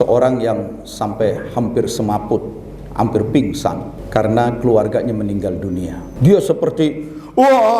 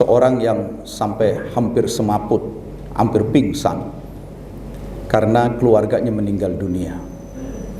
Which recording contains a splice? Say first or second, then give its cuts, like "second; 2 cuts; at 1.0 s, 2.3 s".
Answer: first; 2 cuts; at 3.9 s, 6.0 s